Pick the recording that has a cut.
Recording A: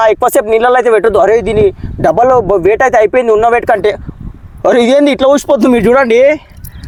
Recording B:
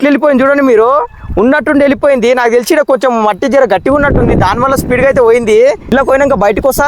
B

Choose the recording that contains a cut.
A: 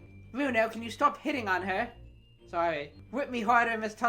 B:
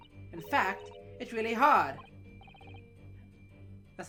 A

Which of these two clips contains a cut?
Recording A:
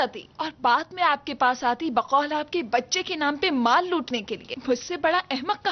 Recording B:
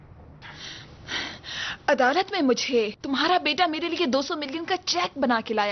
B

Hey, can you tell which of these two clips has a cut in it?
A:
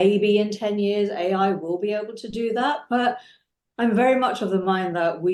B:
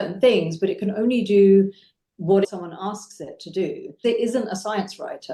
B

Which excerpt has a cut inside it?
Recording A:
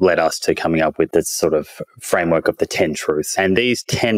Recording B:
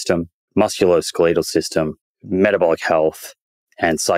A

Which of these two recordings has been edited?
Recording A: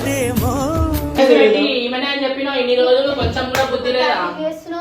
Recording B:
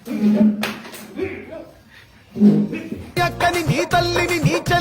A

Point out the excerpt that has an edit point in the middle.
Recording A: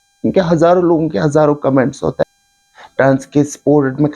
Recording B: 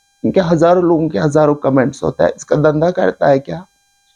A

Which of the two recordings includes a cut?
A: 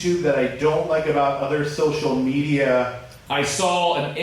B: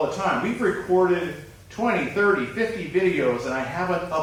A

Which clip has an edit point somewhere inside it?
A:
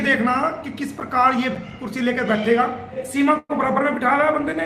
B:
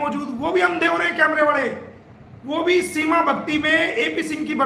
A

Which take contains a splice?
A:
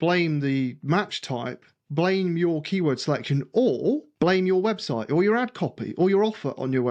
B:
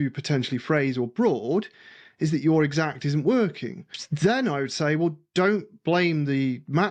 A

